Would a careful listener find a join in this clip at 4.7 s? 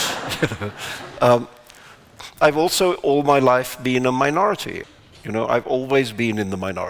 yes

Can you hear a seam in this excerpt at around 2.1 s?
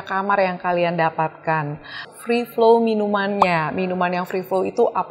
yes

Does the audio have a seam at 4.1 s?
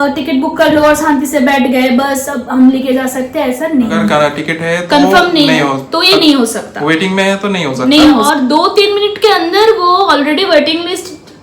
yes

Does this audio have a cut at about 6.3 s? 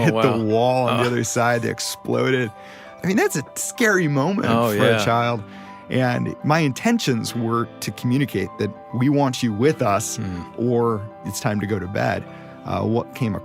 yes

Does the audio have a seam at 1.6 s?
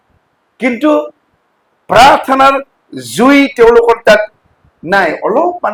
no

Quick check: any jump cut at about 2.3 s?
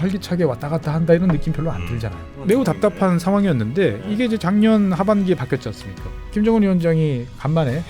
yes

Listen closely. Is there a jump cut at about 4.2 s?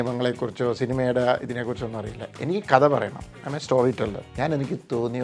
yes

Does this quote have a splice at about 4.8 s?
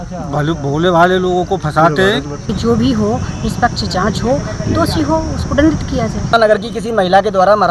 no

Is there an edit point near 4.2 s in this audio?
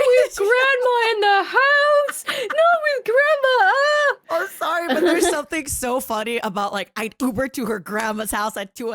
yes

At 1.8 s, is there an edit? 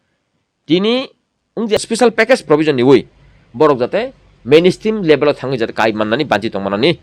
yes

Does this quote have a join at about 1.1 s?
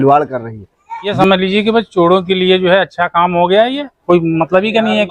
yes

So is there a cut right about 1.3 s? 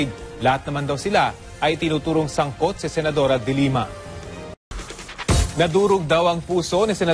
yes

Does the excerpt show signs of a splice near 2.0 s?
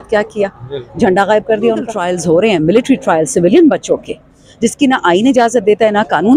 yes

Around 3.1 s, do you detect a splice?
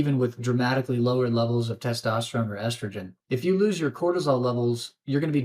yes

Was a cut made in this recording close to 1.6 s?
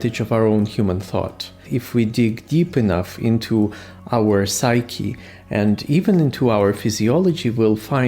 yes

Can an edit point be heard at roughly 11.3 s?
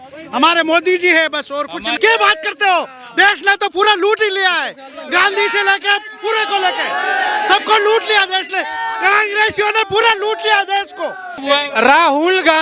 yes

